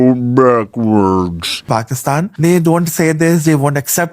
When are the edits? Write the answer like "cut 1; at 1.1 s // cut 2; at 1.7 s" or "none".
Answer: cut 1; at 1.6 s